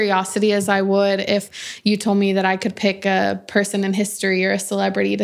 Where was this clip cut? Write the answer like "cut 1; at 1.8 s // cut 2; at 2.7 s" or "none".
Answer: cut 1; at 1.5 s